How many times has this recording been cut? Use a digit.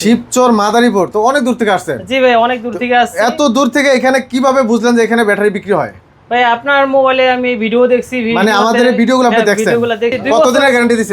1